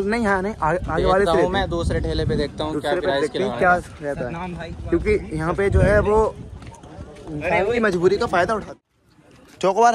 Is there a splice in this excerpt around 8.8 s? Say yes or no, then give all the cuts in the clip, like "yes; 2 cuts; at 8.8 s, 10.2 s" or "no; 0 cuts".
yes; 1 cut; at 8.8 s